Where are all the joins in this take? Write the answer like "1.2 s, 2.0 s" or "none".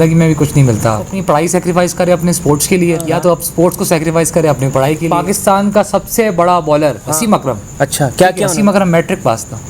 1.1 s, 3.1 s, 5.0 s, 7.0 s, 8.5 s